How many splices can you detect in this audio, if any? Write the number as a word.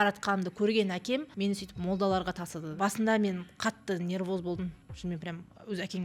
two